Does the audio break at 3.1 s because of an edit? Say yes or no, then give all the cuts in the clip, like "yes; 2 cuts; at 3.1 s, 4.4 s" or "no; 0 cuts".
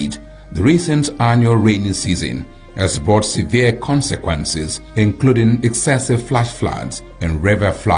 yes; 1 cut; at 3.1 s